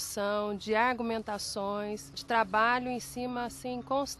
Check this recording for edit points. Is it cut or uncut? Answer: cut